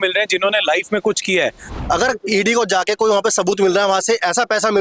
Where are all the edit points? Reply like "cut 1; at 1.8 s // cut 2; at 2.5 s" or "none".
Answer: cut 1; at 1.6 s